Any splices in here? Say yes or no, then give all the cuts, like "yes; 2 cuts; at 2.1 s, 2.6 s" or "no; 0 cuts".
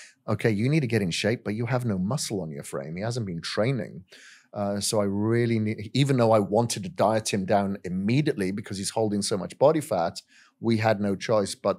no; 0 cuts